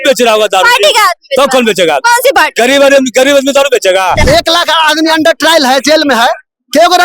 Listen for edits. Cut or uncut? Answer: cut